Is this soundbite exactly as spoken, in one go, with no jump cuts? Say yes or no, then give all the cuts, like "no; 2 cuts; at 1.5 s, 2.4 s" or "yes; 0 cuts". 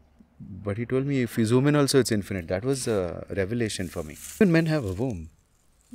no; 1 cut; at 4.4 s